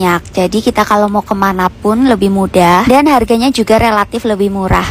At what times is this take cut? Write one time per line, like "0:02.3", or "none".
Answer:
none